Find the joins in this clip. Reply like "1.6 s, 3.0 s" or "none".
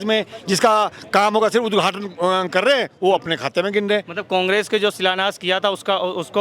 none